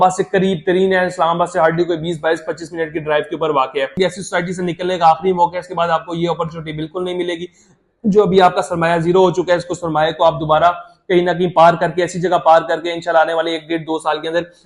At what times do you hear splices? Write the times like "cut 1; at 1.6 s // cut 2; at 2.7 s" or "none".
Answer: cut 1; at 3.9 s